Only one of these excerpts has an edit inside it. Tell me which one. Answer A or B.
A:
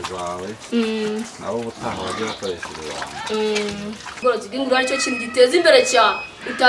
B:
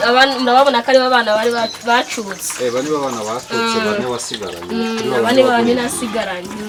A